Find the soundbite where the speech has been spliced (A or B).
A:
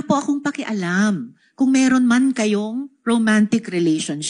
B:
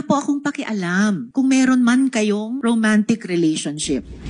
B